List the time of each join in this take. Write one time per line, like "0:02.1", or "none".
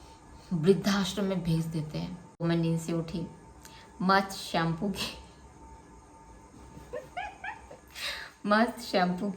0:02.4